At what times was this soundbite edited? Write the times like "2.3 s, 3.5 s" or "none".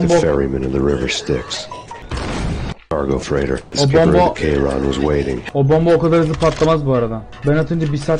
1.9 s, 3.7 s, 5.4 s, 7.3 s